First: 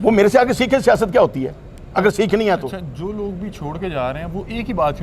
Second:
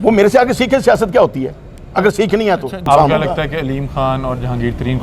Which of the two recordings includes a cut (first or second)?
second